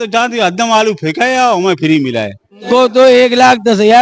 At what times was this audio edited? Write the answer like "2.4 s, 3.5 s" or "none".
2.5 s